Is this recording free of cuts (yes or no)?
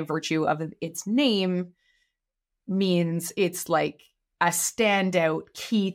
yes